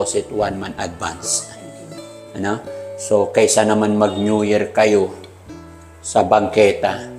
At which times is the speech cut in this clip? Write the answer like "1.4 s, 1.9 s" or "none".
none

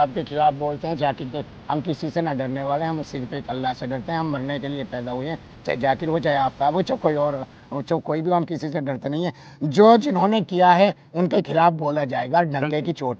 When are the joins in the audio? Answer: none

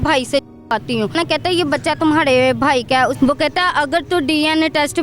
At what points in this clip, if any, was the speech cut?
1.1 s, 3.1 s

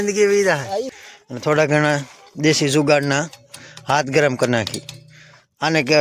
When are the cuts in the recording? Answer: 1.0 s

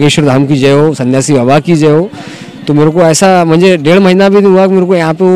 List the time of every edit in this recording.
none

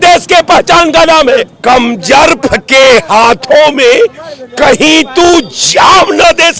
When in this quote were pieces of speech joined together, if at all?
1.5 s

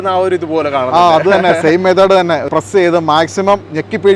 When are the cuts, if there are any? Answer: 2.5 s

